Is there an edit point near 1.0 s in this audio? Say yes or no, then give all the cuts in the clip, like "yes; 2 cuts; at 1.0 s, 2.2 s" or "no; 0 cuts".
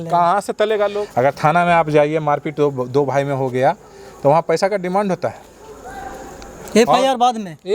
yes; 1 cut; at 1.0 s